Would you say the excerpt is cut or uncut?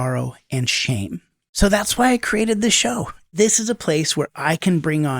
cut